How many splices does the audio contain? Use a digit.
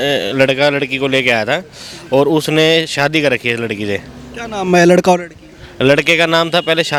0